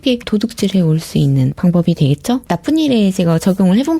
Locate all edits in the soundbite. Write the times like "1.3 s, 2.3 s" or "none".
1.5 s

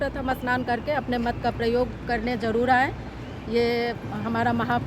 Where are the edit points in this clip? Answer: none

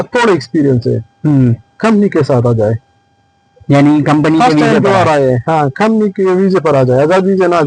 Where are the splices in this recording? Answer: none

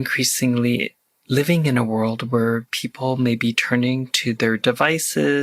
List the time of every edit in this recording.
none

